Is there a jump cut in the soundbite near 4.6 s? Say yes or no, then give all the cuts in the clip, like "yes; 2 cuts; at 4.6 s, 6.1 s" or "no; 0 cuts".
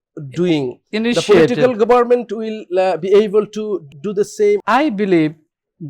yes; 1 cut; at 4.6 s